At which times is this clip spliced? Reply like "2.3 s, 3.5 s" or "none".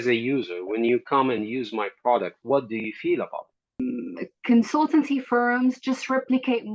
3.8 s